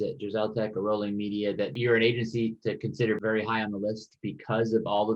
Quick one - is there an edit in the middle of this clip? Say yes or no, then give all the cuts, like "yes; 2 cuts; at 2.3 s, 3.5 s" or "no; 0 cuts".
yes; 1 cut; at 3.2 s